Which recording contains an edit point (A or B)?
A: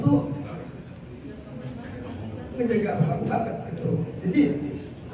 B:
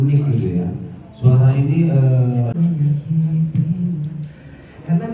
B